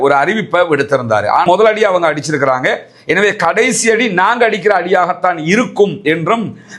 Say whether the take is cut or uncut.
cut